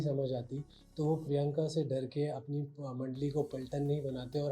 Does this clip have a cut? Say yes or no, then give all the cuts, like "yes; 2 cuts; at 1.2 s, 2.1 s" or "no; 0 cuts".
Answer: no; 0 cuts